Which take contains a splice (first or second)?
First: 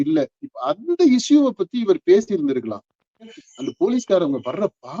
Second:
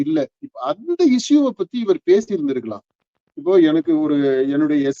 first